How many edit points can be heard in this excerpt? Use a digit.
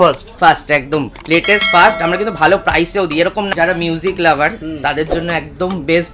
1